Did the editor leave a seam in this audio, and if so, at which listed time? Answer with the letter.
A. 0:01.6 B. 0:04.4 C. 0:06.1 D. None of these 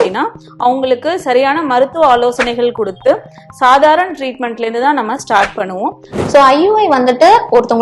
C